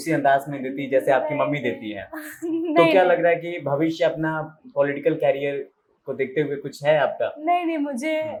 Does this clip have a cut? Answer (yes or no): no